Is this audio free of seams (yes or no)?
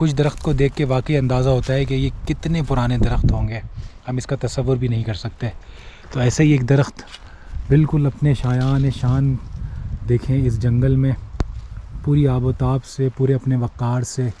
yes